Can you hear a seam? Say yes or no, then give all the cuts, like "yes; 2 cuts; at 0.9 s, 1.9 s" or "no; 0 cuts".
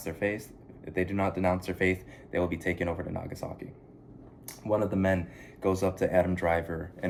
no; 0 cuts